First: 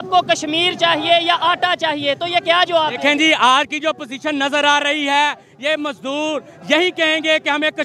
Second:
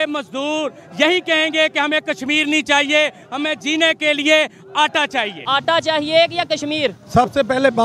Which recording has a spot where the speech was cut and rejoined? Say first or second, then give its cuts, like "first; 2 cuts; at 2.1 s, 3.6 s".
second; 1 cut; at 5.4 s